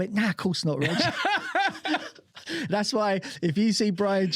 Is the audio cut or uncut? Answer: uncut